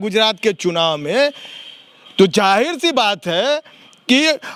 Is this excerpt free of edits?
yes; 0 cuts

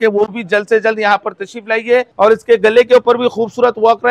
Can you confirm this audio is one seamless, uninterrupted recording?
no; 1 cut; at 2.1 s

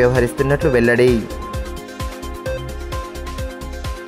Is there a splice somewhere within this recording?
no; 0 cuts

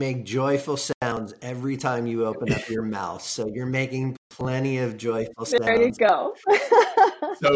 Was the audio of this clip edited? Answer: no; 0 cuts

